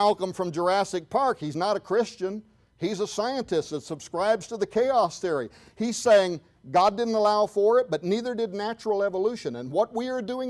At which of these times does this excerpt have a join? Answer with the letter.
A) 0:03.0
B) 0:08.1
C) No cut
C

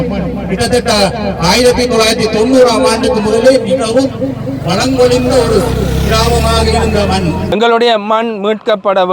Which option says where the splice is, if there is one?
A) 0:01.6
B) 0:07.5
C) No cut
B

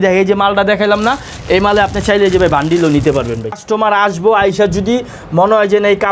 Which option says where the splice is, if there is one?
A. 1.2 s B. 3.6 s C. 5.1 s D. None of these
B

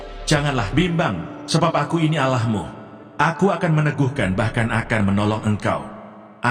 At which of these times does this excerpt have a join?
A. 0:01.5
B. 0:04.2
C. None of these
C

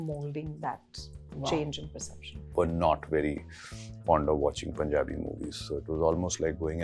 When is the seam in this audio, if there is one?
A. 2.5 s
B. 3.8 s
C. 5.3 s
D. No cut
A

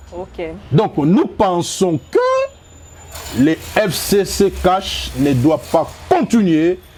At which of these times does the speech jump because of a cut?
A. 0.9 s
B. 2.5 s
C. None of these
C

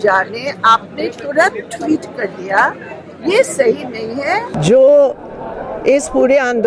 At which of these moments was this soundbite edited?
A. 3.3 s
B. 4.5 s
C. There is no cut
B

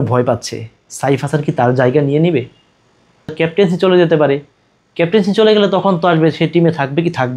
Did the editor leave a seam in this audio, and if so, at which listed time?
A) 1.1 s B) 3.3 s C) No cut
B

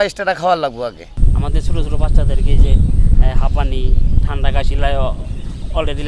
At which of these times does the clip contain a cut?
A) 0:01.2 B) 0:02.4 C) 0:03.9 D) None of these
A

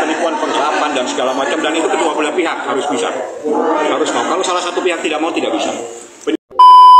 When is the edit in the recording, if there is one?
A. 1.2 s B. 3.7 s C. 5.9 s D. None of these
C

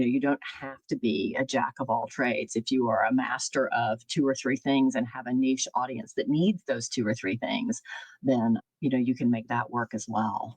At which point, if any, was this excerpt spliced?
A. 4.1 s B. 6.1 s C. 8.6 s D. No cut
C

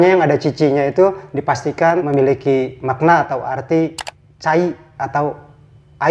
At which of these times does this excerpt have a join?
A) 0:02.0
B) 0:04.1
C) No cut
A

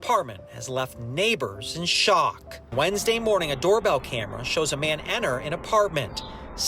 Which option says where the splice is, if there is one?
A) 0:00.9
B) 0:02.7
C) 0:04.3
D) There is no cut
B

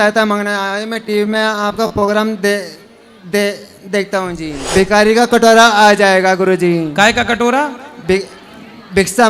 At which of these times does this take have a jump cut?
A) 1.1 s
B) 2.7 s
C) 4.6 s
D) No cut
C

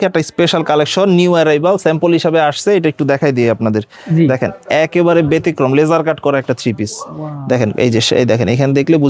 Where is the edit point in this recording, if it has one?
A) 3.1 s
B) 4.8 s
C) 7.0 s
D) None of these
D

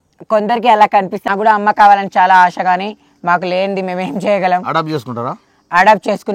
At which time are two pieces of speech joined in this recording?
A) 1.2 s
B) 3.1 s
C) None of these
A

